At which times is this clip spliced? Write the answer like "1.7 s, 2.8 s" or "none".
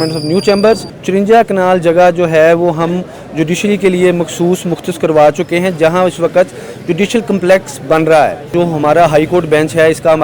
0.9 s, 8.5 s